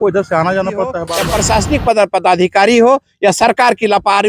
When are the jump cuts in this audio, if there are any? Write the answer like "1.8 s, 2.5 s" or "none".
1.1 s